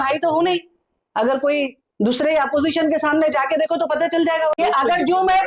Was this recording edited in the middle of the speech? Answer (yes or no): yes